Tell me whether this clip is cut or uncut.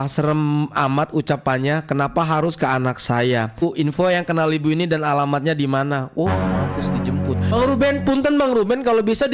cut